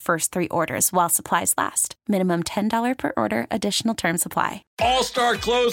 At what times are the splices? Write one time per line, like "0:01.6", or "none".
0:04.6

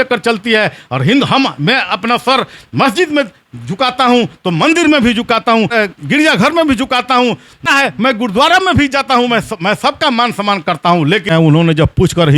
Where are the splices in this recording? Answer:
0:05.7
0:07.6
0:11.2

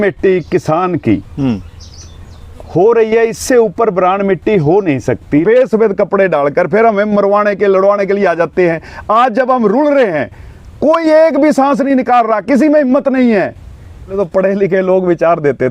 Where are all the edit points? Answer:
0:05.4
0:14.2

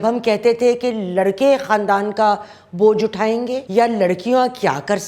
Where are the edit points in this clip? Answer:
0:03.6

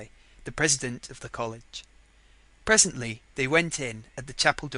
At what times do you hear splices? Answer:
0:01.1

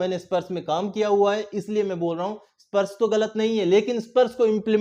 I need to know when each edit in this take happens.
none

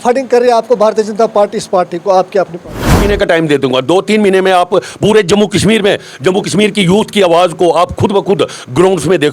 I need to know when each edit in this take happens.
0:03.0

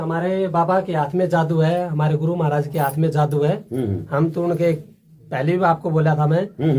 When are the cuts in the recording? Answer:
none

